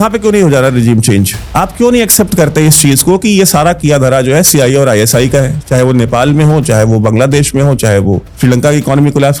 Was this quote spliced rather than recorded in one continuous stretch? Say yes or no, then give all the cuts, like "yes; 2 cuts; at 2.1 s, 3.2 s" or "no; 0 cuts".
no; 0 cuts